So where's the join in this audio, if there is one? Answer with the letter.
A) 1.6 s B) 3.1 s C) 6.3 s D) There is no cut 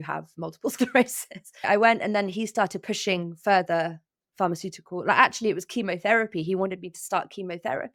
A